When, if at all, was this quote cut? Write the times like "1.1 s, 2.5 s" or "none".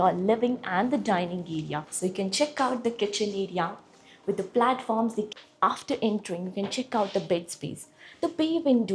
1.9 s, 5.3 s